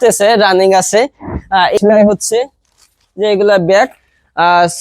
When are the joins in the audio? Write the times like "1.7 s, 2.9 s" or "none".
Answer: 1.7 s

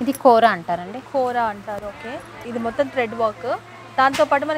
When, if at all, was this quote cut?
2.4 s

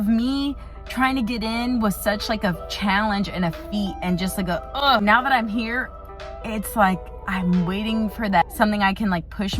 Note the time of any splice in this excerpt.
5.0 s, 8.4 s

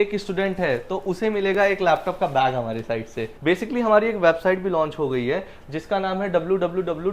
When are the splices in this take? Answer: 3.2 s

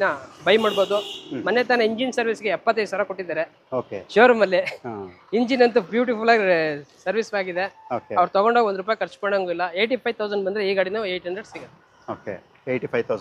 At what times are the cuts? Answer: none

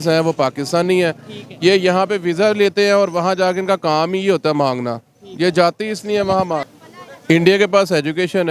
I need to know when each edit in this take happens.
6.8 s

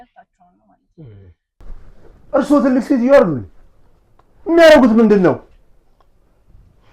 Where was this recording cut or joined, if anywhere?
1.6 s

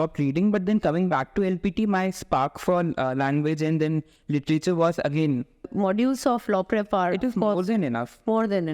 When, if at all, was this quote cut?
5.7 s

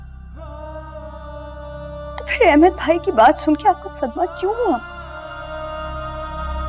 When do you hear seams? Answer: none

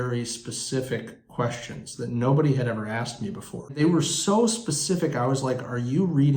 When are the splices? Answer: 3.7 s

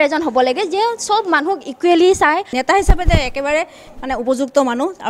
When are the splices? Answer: 2.5 s

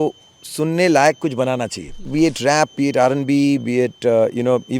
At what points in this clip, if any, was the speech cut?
2.0 s

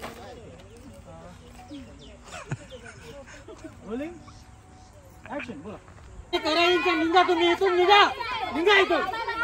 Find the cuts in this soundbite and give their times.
6.3 s

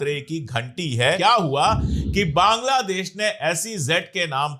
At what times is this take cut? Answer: 1.2 s

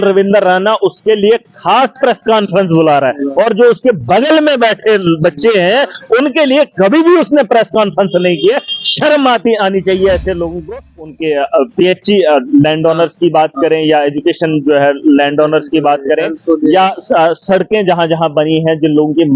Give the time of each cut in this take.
11.0 s

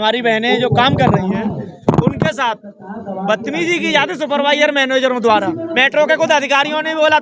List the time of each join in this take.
5.7 s

